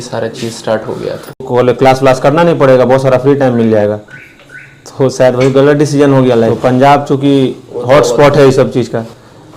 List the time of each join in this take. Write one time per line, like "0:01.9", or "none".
0:01.6
0:06.5